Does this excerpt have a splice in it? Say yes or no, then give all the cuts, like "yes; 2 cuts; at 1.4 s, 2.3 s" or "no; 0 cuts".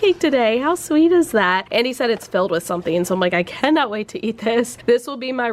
no; 0 cuts